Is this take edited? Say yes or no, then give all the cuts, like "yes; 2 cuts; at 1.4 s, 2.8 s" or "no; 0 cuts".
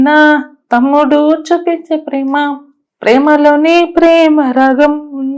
no; 0 cuts